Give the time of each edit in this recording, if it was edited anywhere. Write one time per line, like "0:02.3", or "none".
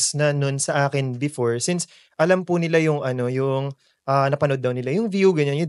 none